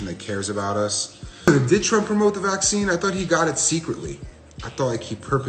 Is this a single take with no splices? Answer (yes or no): no